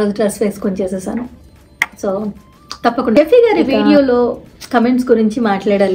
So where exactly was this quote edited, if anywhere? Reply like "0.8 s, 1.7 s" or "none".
3.2 s